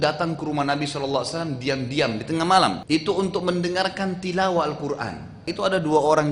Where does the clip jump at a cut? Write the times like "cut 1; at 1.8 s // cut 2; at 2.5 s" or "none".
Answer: cut 1; at 2.8 s // cut 2; at 5.5 s